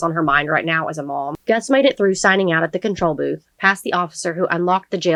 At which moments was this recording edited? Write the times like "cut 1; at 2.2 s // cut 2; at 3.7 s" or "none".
none